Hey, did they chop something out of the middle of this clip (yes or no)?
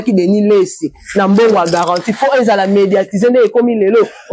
no